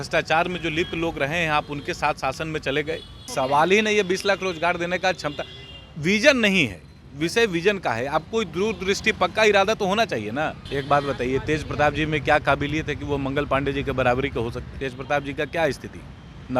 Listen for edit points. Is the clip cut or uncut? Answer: cut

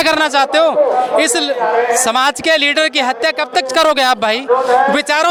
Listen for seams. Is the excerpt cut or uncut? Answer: uncut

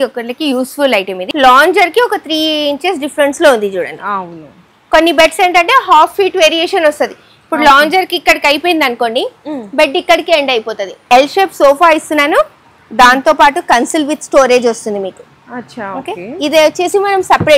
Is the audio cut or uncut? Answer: cut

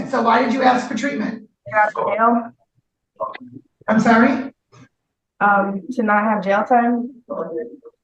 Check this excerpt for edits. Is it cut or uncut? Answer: cut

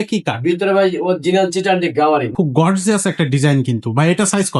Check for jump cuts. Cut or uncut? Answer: cut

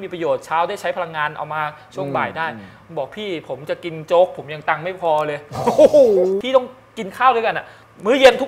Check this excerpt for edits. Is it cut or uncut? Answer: cut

